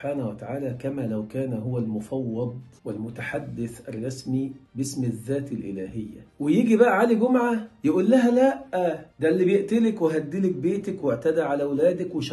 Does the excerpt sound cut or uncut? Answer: cut